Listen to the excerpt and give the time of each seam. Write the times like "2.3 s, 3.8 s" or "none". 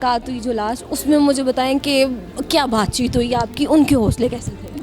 none